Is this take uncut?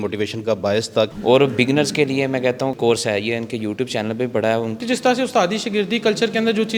no; 3 cuts; at 1.2 s, 2.7 s, 4.8 s

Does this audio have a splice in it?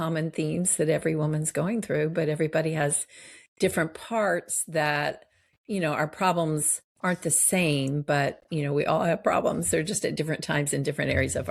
no; 0 cuts

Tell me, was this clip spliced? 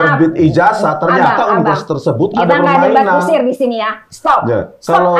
no; 0 cuts

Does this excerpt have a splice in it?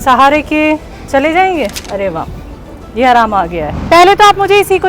yes; 2 cuts; at 1.8 s, 3.7 s

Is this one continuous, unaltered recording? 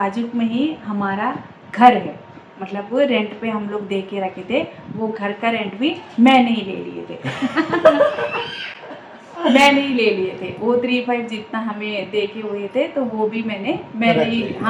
yes; 0 cuts

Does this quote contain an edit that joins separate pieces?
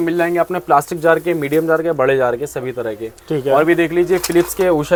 no; 0 cuts

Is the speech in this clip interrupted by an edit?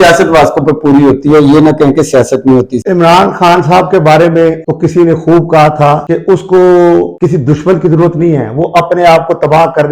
yes; 4 cuts; at 2.8 s, 4.7 s, 6.0 s, 7.1 s

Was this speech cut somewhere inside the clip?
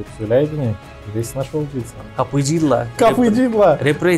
yes; 2 cuts; at 0.9 s, 2.0 s

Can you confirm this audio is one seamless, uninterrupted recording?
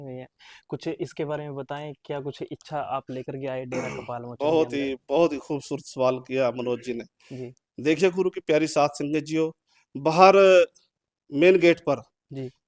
yes; 0 cuts

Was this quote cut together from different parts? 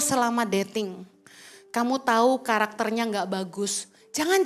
no; 0 cuts

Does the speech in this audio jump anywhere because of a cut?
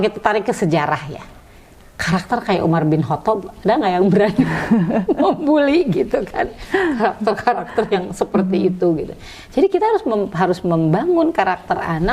no; 0 cuts

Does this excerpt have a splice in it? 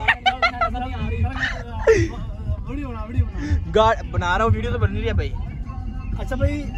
no; 0 cuts

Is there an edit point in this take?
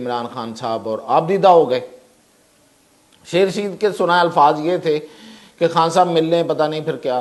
no; 0 cuts

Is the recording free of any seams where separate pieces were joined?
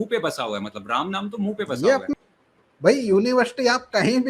no; 1 cut; at 2.1 s

